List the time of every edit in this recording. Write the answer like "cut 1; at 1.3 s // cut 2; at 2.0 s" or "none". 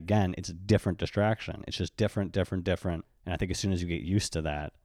cut 1; at 3.1 s